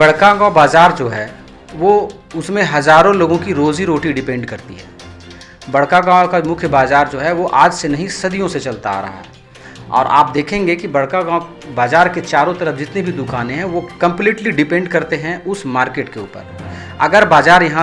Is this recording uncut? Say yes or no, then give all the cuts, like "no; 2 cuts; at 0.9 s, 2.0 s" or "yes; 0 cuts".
yes; 0 cuts